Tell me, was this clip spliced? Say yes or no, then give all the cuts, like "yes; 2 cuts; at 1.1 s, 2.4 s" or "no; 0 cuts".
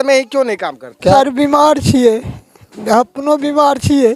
yes; 1 cut; at 1.1 s